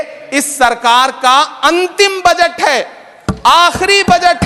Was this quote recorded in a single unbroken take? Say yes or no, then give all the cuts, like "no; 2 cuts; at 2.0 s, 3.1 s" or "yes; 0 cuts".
yes; 0 cuts